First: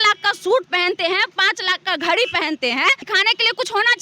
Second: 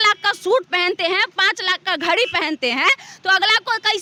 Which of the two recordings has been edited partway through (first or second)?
first